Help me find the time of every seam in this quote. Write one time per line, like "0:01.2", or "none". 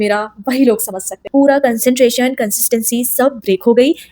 0:01.2